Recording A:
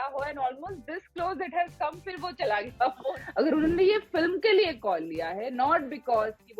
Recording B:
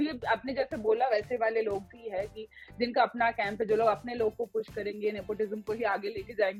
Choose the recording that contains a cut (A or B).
A